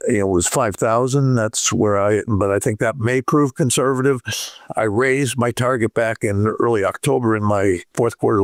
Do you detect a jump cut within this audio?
no; 0 cuts

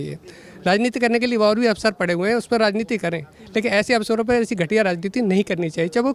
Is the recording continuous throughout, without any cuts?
yes; 0 cuts

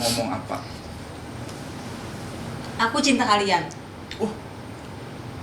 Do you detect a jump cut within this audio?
no; 0 cuts

